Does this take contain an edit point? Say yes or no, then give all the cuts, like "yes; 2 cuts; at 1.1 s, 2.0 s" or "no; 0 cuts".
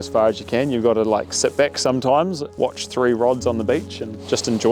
yes; 1 cut; at 2.5 s